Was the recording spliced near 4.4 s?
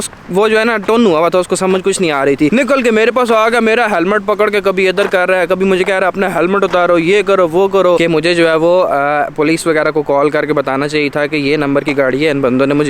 no; 2 cuts; at 2.5 s, 8.0 s

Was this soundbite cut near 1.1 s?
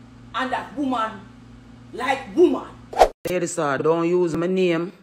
no; 1 cut; at 3.3 s

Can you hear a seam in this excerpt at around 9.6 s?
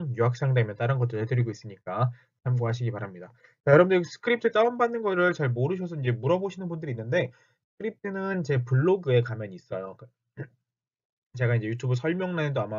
yes; 1 cut; at 9.6 s

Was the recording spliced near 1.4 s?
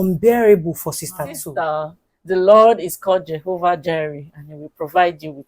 yes; 1 cut; at 1.4 s

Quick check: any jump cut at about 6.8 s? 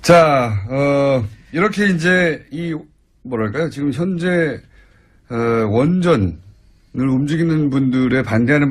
yes; 1 cut; at 6.8 s

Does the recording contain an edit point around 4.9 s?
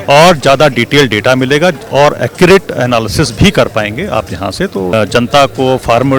yes; 1 cut; at 4.9 s

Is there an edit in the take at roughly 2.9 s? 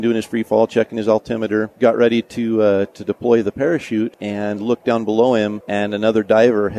no; 3 cuts; at 1.7 s, 4.2 s, 5.6 s

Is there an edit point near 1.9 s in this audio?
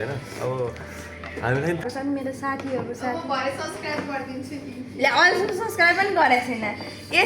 yes; 1 cut; at 1.9 s

